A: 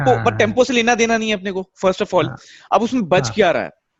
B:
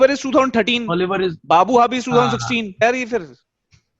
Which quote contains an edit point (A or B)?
B